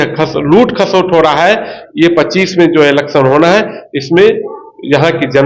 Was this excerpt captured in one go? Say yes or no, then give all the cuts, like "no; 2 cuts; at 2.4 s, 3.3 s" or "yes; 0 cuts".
yes; 0 cuts